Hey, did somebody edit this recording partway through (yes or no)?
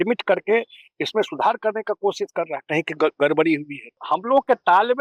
yes